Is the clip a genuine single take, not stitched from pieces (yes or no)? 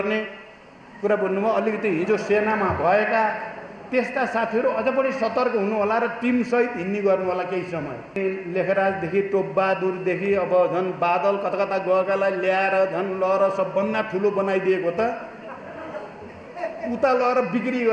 no